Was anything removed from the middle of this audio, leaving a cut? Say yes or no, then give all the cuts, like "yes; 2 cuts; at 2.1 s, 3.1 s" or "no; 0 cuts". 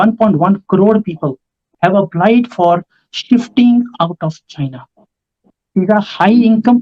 yes; 2 cuts; at 1.7 s, 5.4 s